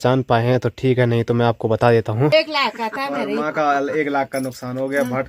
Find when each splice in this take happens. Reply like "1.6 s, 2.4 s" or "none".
2.3 s